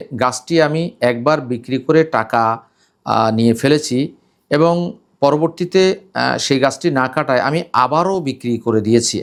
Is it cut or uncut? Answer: uncut